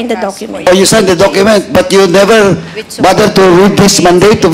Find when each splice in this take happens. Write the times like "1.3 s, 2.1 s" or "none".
none